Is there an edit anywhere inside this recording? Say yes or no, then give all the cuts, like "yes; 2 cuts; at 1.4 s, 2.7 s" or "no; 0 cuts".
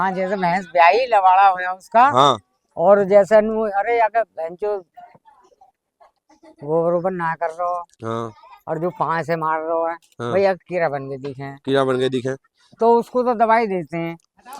no; 0 cuts